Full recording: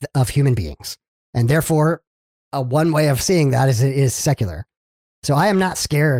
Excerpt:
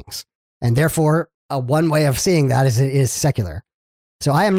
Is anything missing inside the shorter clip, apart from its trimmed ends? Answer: yes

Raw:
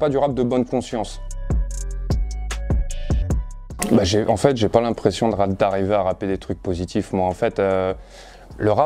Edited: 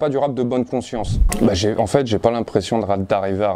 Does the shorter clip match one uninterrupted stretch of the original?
no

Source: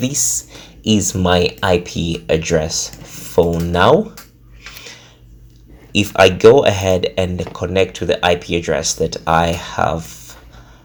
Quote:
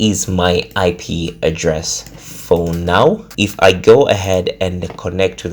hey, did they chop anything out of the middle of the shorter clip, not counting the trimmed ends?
yes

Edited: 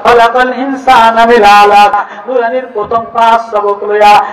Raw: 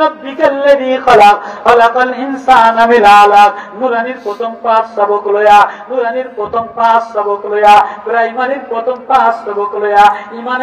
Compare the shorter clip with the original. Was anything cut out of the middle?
yes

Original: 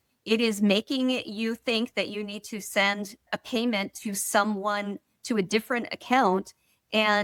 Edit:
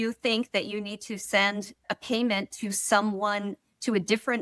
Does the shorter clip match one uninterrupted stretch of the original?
yes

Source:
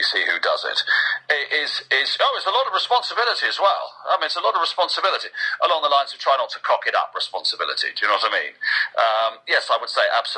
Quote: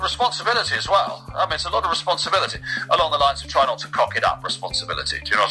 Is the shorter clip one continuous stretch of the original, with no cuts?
yes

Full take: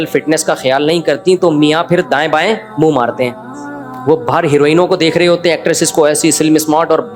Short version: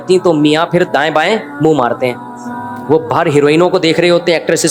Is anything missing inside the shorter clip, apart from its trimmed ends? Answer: no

